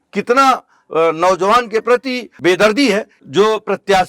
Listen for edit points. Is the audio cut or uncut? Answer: cut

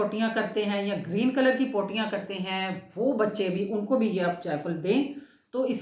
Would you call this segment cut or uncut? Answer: uncut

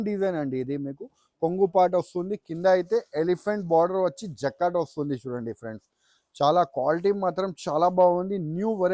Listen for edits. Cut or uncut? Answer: uncut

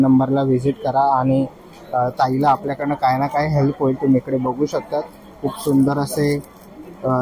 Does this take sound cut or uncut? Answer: uncut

